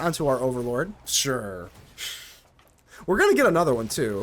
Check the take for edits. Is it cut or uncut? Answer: cut